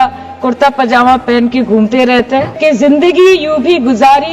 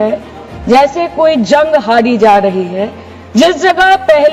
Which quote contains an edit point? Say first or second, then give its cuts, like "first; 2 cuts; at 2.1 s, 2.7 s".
first; 1 cut; at 2.6 s